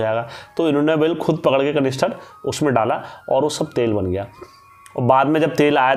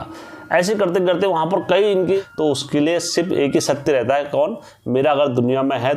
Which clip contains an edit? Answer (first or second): second